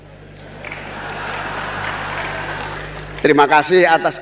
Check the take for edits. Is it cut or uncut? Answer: cut